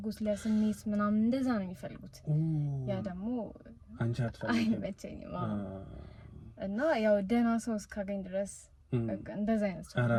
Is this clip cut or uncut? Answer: uncut